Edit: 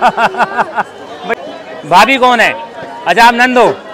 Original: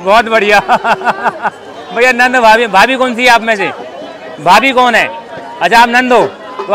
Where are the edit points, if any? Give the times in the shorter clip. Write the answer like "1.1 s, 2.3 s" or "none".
1.2 s

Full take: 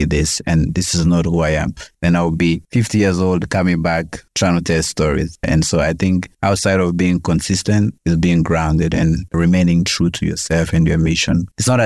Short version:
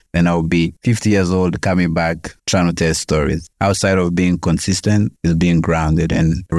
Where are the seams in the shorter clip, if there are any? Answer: 3.5 s

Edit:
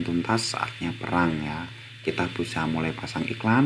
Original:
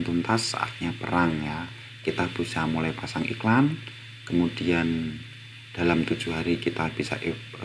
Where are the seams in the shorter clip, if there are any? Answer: none

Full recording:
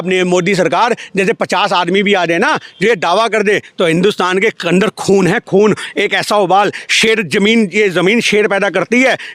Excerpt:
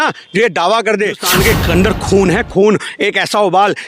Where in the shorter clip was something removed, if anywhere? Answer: 1.2 s

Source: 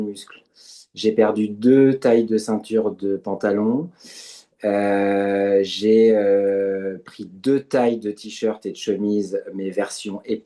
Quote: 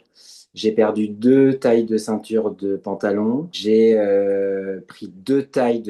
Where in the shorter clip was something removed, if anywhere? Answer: 3.6 s

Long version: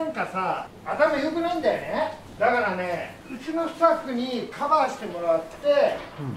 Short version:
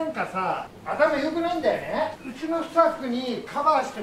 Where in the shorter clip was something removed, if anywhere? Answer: 2.2 s

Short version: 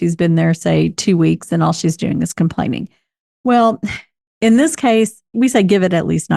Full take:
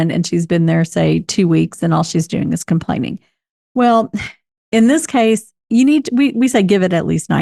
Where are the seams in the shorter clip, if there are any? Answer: 5.3 s

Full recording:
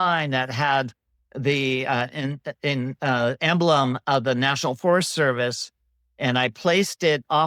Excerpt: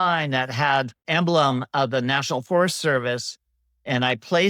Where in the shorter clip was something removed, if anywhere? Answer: 1.0 s

